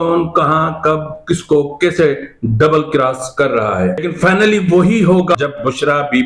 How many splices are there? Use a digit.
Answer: 2